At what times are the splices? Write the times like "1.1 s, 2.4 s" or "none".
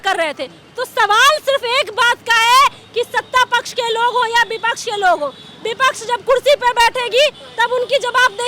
none

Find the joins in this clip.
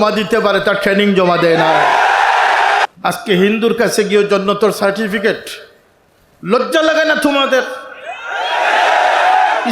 2.9 s

